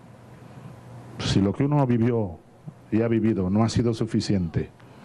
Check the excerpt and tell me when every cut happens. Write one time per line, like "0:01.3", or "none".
0:03.8